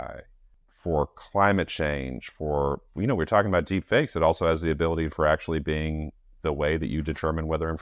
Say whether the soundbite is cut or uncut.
uncut